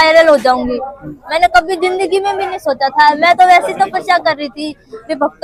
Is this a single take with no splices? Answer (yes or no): yes